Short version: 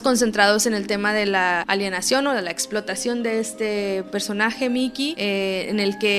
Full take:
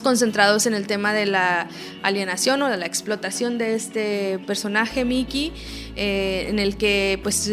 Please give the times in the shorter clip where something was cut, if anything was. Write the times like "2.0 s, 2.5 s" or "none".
1.6 s, 5.2 s